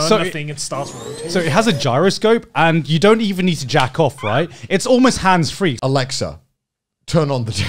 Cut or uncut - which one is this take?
cut